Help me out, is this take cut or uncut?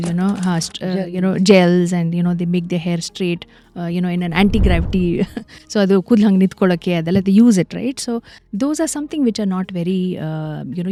uncut